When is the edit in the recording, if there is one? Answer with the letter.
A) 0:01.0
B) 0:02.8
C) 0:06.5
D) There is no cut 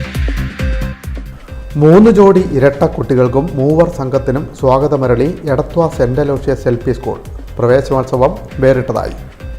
A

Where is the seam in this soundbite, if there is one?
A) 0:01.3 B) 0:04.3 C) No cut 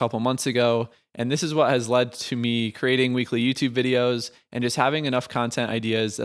C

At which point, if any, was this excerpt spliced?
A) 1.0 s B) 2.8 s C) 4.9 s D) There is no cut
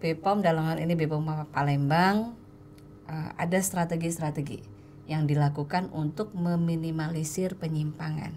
D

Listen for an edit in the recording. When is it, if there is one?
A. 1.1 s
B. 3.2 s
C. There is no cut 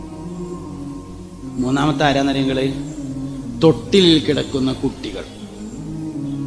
A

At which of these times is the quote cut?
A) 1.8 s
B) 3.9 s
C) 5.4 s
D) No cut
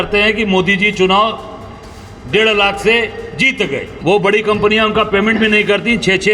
B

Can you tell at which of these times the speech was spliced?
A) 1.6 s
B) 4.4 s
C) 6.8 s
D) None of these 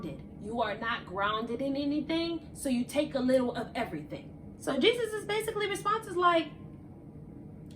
B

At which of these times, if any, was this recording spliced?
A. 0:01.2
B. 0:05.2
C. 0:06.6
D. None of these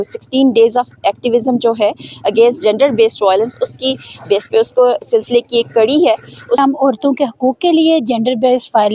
C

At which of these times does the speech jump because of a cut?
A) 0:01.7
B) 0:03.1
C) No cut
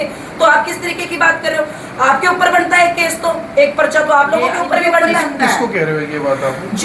C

